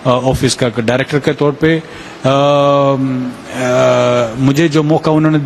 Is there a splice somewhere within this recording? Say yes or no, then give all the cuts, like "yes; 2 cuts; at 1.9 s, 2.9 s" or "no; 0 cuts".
no; 0 cuts